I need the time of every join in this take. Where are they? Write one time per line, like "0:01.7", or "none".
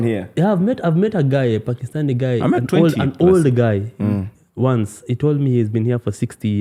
none

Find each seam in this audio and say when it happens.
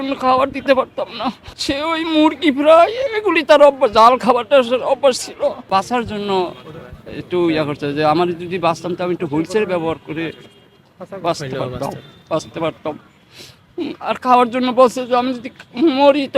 0:01.5
0:05.7

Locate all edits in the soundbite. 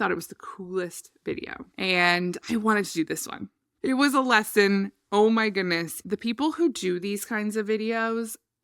0:02.4

